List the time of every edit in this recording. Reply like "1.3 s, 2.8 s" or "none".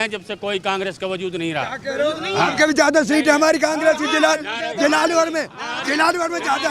none